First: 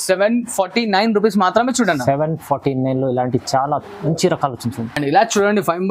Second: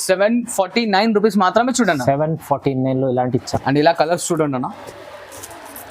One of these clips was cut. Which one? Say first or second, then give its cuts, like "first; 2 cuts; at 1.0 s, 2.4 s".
second; 1 cut; at 3.5 s